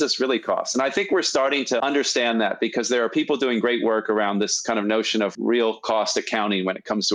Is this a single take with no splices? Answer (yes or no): yes